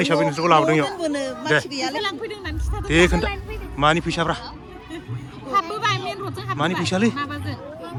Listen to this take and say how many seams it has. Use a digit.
0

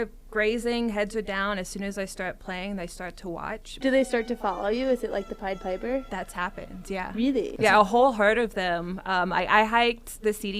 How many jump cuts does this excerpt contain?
2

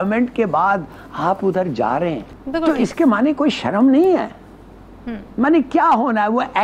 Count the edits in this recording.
1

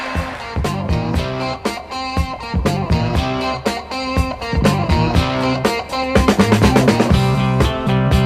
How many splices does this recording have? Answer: 1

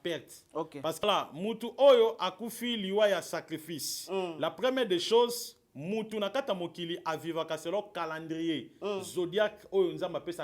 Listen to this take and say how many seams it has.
1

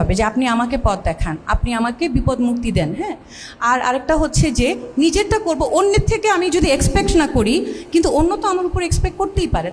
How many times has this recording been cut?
0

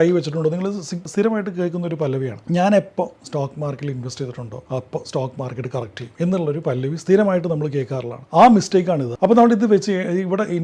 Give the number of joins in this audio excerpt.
1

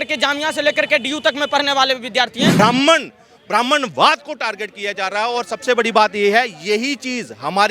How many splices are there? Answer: 1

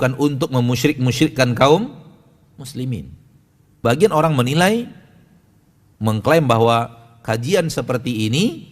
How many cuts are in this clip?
1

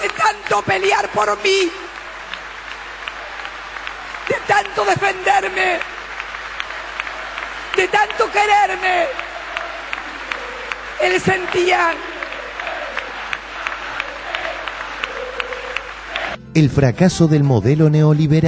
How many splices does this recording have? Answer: 1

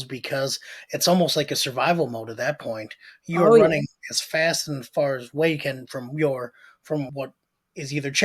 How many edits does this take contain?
1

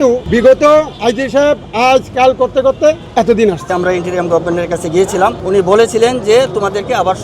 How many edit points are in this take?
1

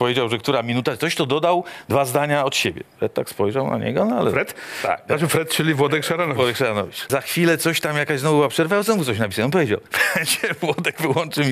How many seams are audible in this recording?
1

